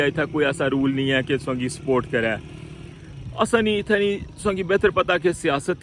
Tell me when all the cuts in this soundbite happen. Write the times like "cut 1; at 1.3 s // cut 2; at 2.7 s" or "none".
none